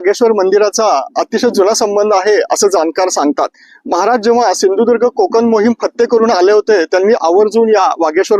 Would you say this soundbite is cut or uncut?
uncut